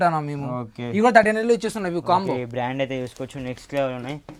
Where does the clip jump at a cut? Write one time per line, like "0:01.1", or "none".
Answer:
none